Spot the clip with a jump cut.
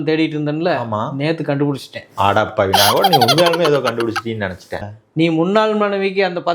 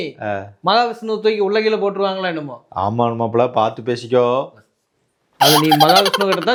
first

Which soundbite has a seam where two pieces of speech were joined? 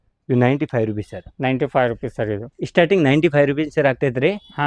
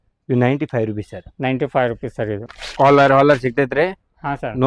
second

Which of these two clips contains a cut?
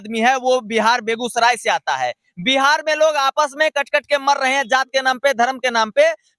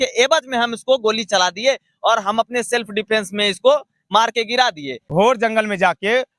second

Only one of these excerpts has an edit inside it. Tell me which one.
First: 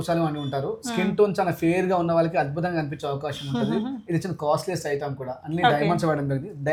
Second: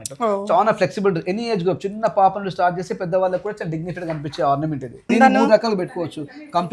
second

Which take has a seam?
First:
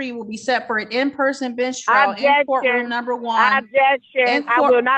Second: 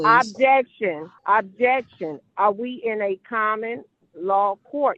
second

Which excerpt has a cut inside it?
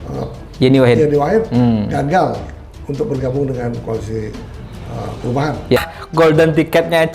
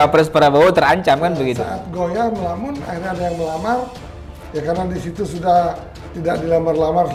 first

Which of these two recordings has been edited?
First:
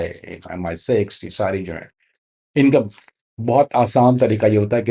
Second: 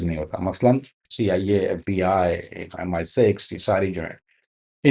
second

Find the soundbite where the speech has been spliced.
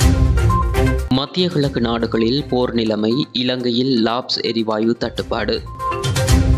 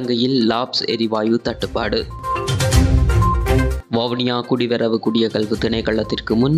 first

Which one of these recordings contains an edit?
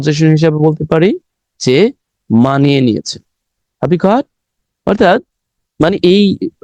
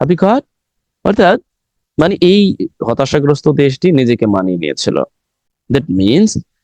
second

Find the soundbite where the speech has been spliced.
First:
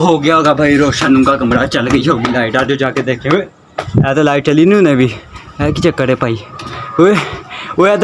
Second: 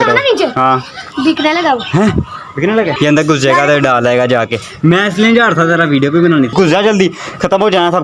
second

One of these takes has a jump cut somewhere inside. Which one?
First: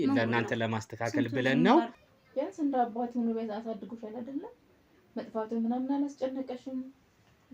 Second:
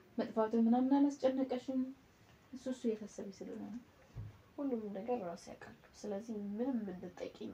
first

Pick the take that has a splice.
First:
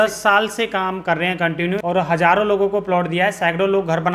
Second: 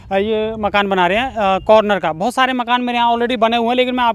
first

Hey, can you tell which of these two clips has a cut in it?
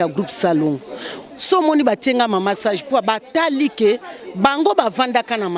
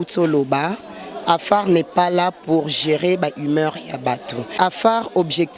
second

